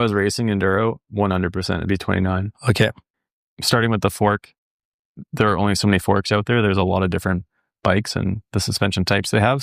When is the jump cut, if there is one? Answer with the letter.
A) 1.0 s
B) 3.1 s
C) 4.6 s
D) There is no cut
B